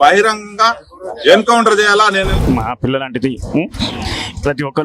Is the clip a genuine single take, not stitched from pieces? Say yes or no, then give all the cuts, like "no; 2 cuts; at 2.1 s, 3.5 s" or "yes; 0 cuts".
no; 1 cut; at 2.3 s